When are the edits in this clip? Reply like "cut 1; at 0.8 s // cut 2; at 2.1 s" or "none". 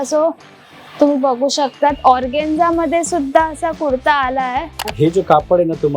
cut 1; at 4.9 s